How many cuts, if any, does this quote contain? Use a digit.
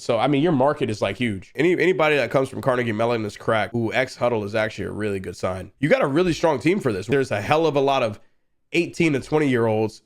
3